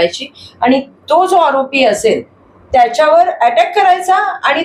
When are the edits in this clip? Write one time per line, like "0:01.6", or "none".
none